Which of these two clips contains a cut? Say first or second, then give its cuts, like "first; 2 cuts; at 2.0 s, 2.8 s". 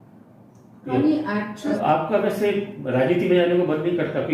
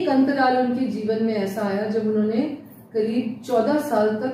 first; 1 cut; at 1.7 s